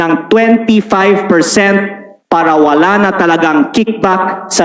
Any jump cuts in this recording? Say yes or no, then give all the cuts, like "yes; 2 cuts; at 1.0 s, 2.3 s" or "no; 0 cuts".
no; 0 cuts